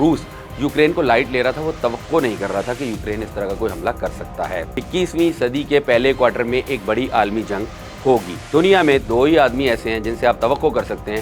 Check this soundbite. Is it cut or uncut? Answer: cut